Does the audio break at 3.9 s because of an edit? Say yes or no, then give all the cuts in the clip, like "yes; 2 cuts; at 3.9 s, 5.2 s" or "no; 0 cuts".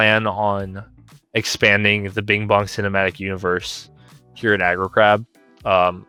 no; 0 cuts